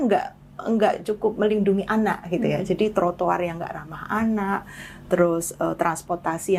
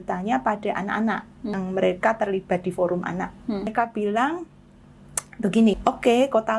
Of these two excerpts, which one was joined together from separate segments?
second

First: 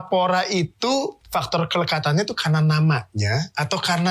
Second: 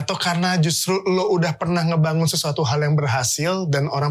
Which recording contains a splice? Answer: first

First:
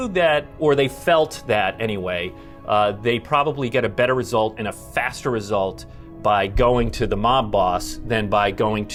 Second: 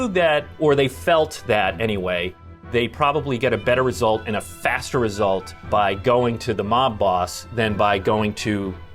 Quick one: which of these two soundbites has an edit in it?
second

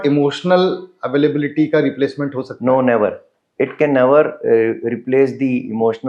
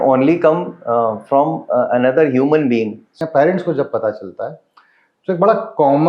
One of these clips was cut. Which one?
second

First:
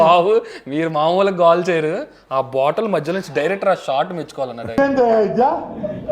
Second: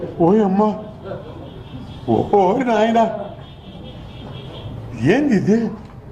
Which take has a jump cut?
first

